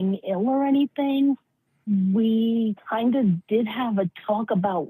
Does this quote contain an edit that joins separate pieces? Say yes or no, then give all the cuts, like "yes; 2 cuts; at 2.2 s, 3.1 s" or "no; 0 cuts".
yes; 1 cut; at 1.8 s